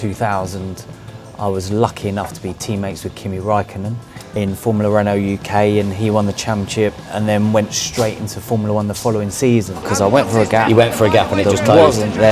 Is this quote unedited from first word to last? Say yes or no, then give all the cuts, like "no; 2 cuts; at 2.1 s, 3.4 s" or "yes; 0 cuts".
no; 2 cuts; at 4.2 s, 9.8 s